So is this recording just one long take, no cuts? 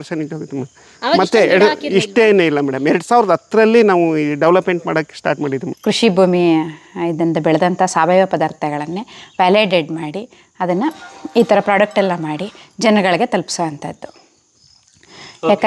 no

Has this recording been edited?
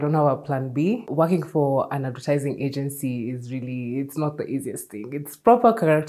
yes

